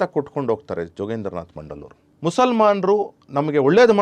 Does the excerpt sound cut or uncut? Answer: cut